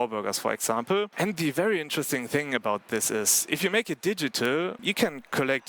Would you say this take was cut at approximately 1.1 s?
yes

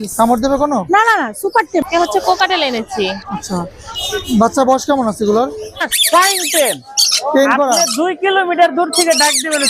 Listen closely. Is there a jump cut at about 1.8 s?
yes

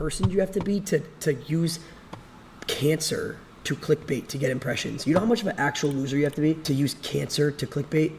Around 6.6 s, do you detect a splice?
yes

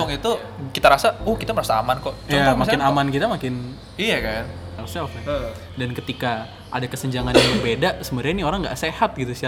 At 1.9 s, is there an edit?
no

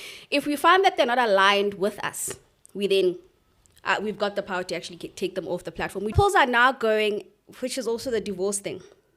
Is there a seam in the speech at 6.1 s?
yes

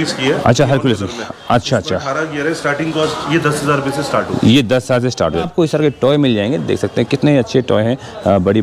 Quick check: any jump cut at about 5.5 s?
yes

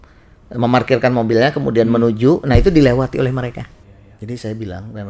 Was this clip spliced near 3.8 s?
yes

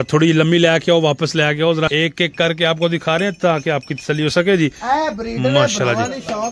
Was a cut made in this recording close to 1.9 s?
yes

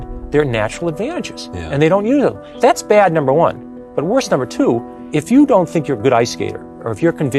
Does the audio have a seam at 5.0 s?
yes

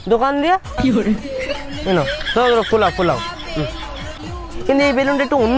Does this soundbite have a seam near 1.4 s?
no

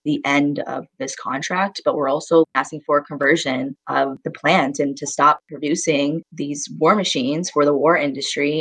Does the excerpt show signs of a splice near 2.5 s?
yes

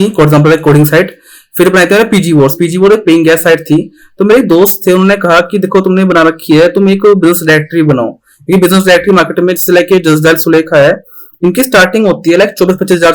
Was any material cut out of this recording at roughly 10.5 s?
no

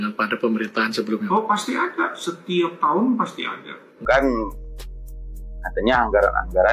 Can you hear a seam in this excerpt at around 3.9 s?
yes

